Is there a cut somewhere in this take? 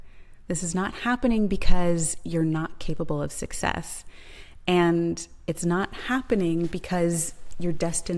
no; 0 cuts

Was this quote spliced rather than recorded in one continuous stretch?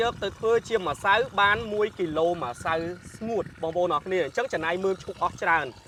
no; 0 cuts

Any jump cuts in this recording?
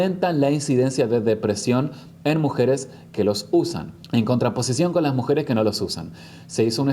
no; 0 cuts

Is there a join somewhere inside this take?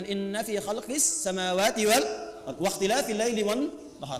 no; 0 cuts

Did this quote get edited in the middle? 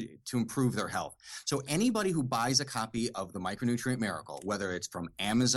no; 0 cuts

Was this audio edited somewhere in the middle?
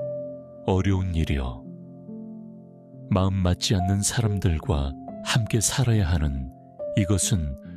no; 0 cuts

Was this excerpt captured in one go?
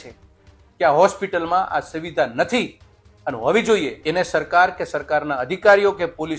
no; 1 cut; at 4.0 s

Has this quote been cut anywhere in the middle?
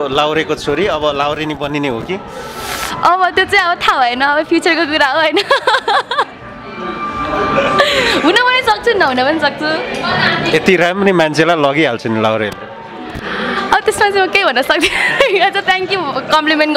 no; 0 cuts

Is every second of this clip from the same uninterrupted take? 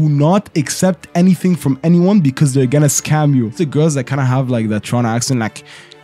no; 1 cut; at 3.6 s

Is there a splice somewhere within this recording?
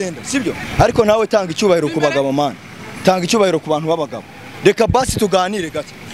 no; 0 cuts

